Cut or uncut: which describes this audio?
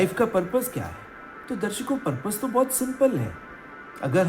uncut